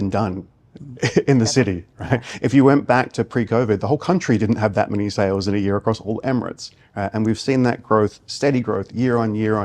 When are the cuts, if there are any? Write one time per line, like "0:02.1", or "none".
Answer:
none

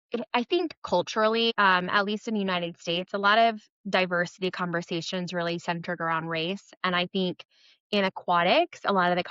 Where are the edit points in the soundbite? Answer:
0:01.5

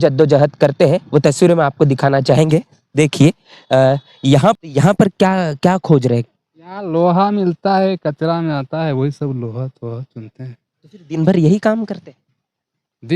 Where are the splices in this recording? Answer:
0:04.6

